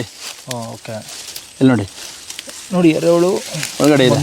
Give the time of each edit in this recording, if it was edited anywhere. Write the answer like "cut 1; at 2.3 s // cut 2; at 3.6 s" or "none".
none